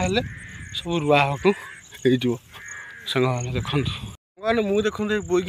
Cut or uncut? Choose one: cut